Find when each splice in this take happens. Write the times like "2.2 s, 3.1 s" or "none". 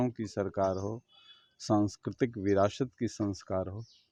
none

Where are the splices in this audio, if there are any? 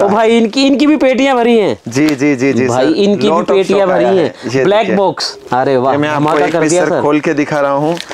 5.3 s

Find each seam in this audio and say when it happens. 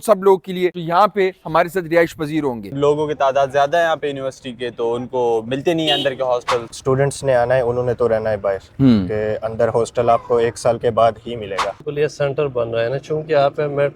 2.7 s, 6.7 s, 11.8 s

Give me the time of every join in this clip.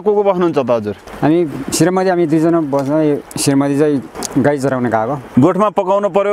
1.0 s, 3.3 s, 4.2 s, 5.2 s

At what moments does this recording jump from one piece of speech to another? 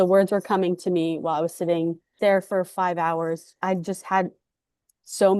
2.1 s, 3.5 s

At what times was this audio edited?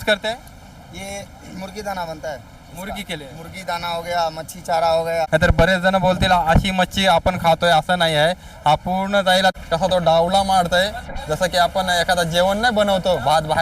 5.3 s, 9.5 s

